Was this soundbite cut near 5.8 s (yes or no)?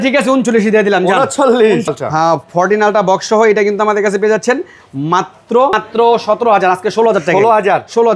yes